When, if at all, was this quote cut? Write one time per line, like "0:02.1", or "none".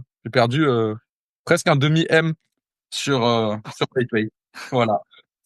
none